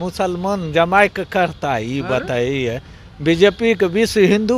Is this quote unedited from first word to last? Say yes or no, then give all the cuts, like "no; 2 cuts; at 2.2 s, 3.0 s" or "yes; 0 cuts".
yes; 0 cuts